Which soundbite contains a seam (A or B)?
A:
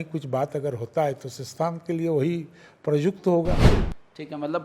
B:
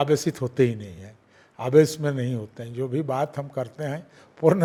A